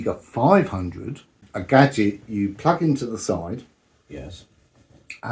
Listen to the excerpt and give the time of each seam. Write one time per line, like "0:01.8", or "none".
0:01.5